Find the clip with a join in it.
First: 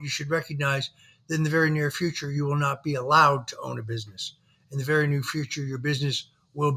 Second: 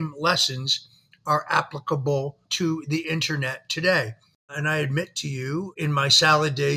second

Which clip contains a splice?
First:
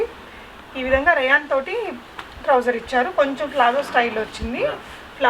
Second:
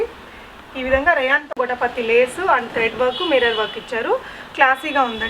second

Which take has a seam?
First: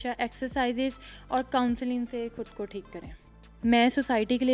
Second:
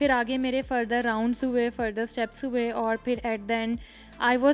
first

